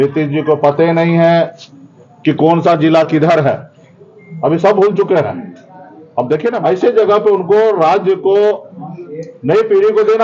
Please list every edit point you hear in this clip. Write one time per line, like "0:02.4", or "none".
0:06.6